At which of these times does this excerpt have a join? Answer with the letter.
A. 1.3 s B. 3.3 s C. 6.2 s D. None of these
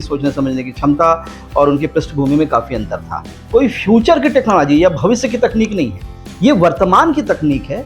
B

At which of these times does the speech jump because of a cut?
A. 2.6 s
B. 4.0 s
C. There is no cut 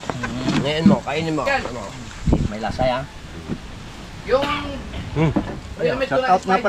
C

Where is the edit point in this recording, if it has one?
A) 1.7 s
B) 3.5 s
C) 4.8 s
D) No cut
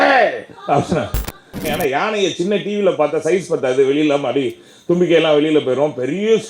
A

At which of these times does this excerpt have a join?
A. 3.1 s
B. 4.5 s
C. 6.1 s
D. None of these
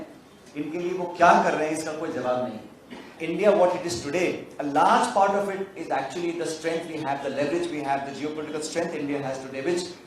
A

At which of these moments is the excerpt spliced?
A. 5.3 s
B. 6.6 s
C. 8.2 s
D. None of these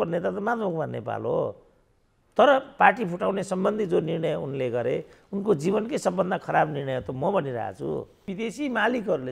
C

